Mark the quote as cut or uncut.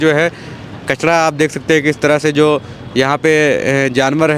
uncut